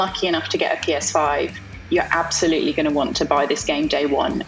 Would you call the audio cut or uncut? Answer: uncut